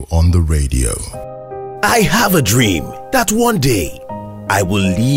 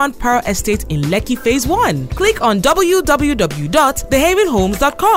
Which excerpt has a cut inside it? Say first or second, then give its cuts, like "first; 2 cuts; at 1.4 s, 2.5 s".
first; 1 cut; at 1.0 s